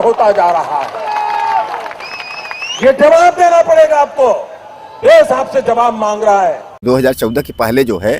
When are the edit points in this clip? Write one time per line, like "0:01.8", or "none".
0:06.8

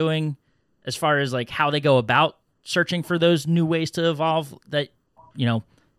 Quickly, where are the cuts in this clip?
none

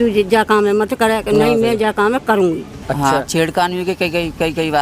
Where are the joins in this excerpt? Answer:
0:02.7

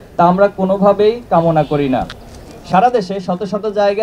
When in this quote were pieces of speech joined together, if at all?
none

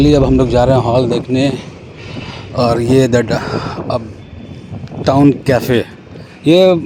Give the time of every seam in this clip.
none

